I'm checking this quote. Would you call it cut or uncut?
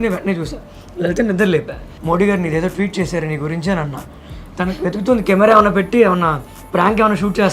cut